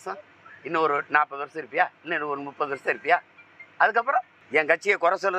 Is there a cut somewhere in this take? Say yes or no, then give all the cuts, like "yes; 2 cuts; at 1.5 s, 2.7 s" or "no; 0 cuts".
yes; 1 cut; at 4.4 s